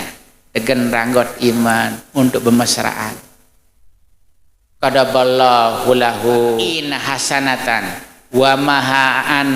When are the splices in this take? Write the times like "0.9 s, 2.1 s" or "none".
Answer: 6.9 s